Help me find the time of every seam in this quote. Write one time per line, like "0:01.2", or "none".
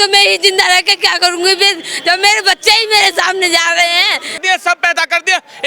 0:04.4